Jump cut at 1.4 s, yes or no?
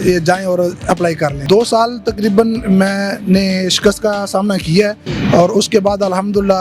yes